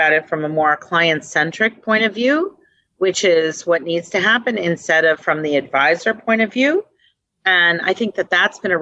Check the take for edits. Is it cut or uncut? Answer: uncut